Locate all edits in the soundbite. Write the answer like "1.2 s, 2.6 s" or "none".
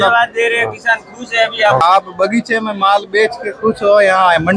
1.8 s